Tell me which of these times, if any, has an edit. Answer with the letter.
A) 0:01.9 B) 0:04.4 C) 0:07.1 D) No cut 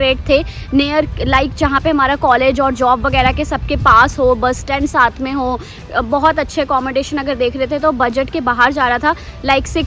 D